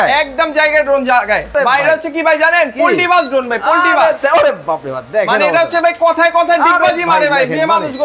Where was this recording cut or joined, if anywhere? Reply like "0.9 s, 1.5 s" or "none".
1.5 s